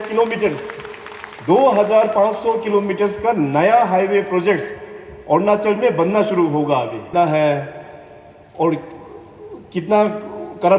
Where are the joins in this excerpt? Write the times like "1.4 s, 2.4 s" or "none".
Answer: 7.1 s